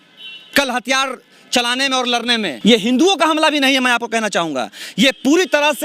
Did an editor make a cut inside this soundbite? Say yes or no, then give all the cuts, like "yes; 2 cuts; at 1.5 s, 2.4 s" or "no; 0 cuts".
yes; 1 cut; at 2.5 s